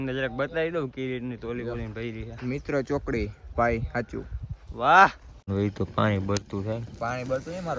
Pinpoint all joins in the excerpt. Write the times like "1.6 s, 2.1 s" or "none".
5.5 s